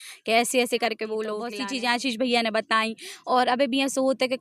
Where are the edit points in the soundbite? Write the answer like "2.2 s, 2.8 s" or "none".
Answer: 1.5 s